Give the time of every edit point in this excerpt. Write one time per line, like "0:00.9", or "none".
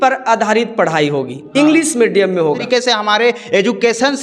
0:02.6